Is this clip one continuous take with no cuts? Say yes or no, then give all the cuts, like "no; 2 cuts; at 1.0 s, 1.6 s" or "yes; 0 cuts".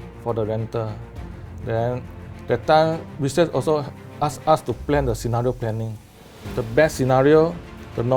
yes; 0 cuts